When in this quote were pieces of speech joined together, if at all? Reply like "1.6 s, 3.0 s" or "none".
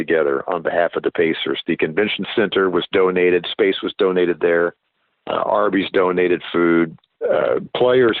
7.1 s

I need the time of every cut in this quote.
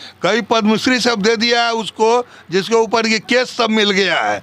none

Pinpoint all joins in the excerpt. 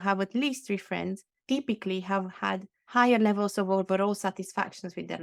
none

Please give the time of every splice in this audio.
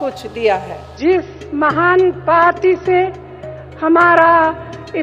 1.0 s

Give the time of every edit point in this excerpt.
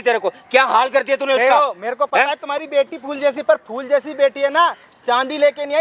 none

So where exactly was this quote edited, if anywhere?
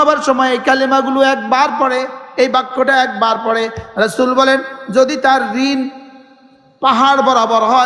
none

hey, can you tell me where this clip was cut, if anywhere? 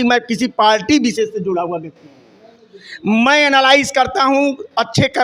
none

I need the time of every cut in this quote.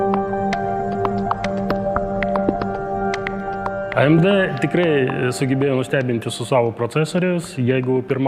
none

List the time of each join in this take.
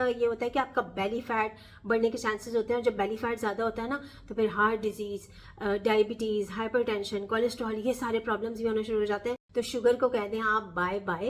9.4 s

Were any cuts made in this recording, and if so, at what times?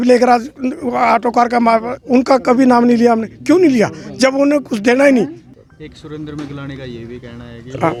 none

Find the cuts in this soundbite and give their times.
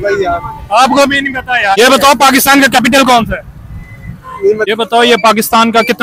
1.8 s, 4.7 s

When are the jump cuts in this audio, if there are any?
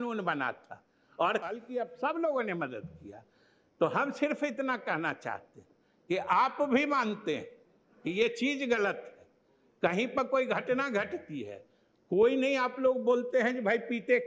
1.5 s

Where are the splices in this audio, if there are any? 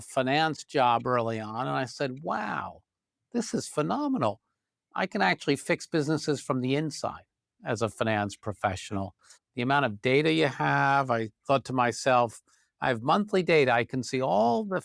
none

